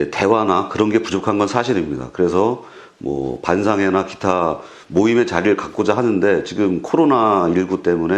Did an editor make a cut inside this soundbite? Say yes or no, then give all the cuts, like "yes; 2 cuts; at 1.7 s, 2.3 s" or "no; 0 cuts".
no; 0 cuts